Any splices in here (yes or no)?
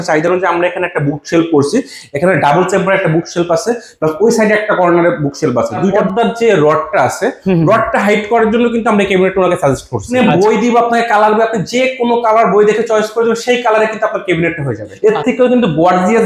yes